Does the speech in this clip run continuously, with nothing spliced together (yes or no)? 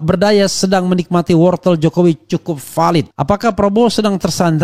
no